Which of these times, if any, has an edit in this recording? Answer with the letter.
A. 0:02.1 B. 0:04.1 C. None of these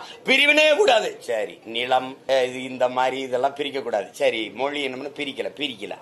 A